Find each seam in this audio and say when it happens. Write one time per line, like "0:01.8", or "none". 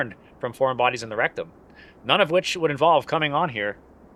none